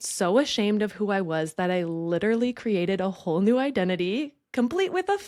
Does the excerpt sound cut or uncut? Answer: uncut